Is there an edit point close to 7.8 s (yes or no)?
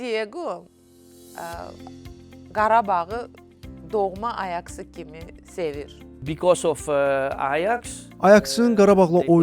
no